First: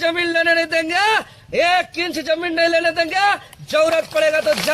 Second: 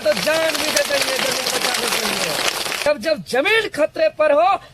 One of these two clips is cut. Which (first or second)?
second